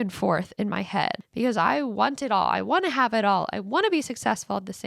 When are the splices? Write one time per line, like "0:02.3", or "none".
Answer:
0:01.2